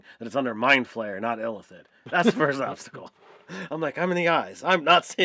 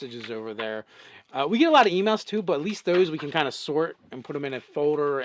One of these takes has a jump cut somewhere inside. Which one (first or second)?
first